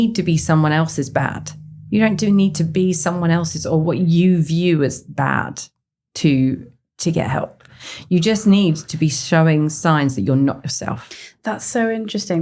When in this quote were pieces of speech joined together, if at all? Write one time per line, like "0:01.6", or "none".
none

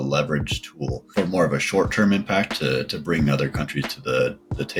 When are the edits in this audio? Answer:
none

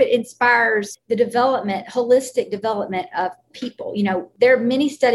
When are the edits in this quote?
0:00.9
0:04.3

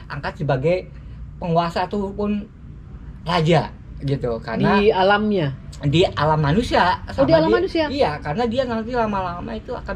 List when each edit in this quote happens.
none

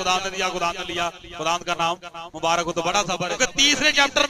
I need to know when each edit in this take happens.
0:03.3

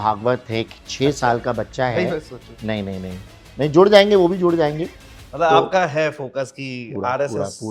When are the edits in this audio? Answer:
none

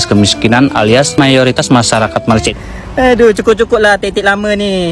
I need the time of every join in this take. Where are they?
0:02.5

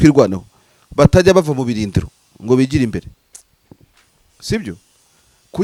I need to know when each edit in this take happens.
none

